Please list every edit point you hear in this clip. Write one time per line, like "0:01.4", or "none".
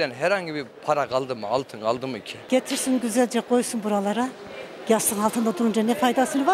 0:02.3